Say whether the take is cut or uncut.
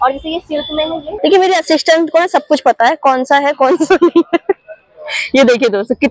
cut